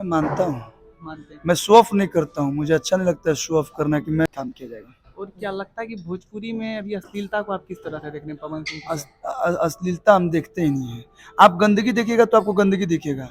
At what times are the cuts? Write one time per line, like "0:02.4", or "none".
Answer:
0:04.3

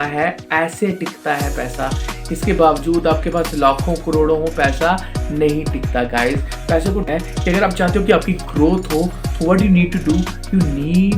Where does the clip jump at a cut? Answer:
0:07.0

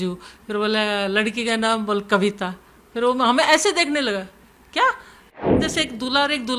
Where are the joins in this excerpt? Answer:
0:05.6

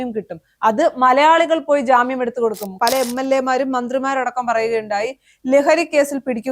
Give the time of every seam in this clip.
0:02.7

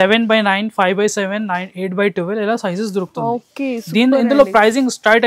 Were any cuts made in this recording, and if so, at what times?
none

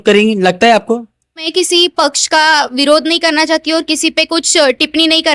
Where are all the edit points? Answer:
0:01.4

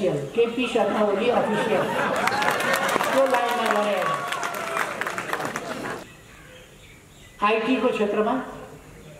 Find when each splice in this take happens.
0:06.0

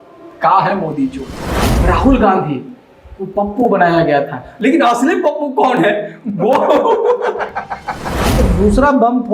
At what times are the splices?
0:01.7
0:08.2

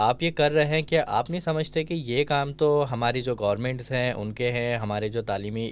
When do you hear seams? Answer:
none

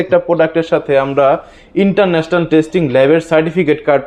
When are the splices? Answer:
none

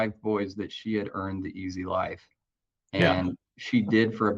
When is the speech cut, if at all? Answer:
none

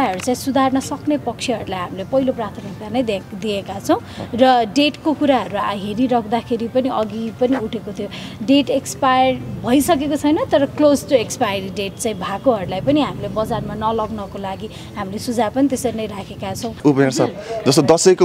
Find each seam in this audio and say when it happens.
0:16.8

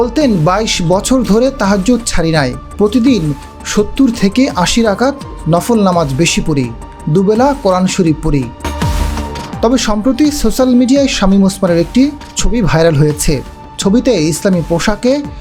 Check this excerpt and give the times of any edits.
0:08.6

